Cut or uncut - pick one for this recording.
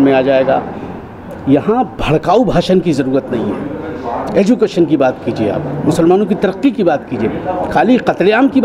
uncut